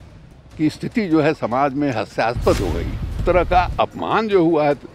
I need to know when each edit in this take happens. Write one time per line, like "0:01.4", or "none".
0:03.2

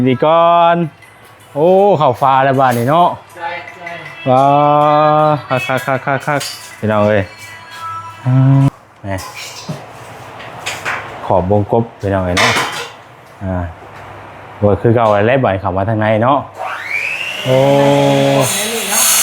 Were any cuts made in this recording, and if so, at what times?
0:08.7

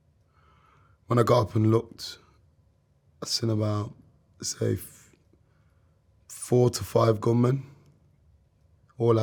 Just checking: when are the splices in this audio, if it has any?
none

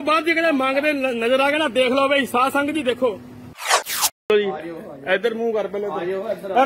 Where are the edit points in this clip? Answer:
none

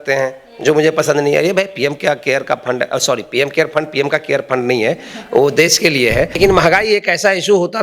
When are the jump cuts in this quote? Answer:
0:06.4

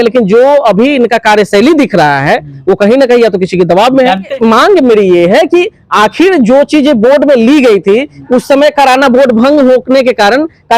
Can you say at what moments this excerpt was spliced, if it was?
0:04.3

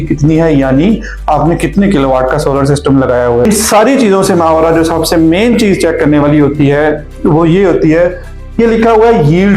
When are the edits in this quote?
0:03.4

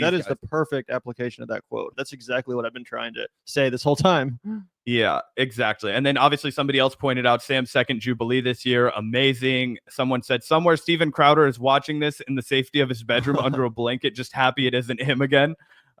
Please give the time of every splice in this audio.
0:01.9

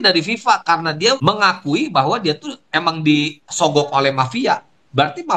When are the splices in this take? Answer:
0:01.2

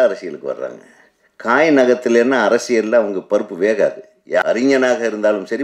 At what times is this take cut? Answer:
0:04.4

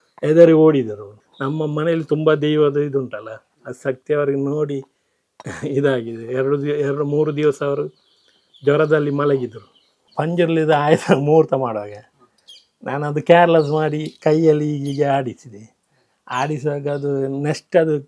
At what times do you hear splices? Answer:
0:01.3
0:10.0

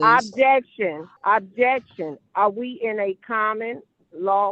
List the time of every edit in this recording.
0:01.1

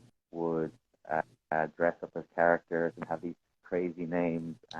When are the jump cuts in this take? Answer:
none

